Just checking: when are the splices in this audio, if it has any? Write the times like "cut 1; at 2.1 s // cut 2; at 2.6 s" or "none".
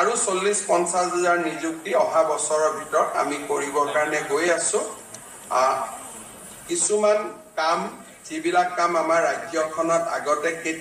none